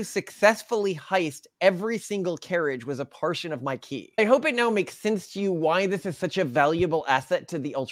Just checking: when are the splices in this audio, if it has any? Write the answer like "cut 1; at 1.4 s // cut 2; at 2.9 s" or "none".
cut 1; at 4.2 s